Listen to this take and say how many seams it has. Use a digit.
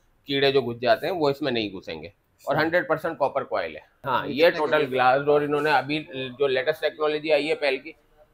1